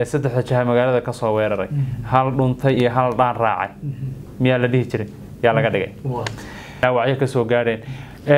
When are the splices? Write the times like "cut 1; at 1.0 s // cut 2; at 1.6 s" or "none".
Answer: cut 1; at 6.8 s